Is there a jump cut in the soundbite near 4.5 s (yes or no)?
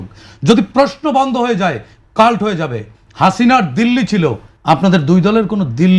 yes